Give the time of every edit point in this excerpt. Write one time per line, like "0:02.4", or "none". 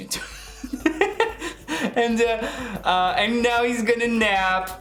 none